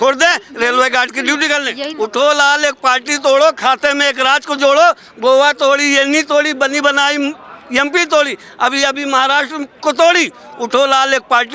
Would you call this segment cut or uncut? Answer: cut